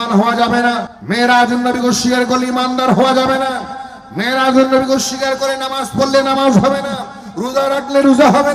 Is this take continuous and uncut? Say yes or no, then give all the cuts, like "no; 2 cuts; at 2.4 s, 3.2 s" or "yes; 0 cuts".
no; 1 cut; at 0.9 s